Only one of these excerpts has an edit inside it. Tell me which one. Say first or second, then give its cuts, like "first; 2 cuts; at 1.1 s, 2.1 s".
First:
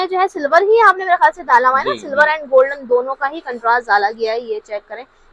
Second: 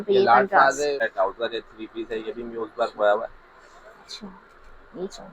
second; 1 cut; at 1.0 s